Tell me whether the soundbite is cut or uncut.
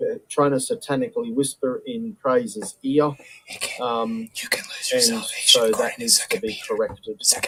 uncut